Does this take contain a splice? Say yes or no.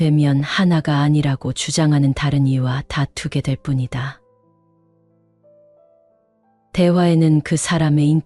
yes